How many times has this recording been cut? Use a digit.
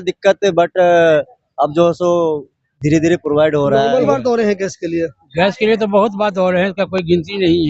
1